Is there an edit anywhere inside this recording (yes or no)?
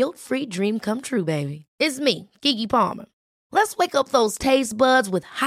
no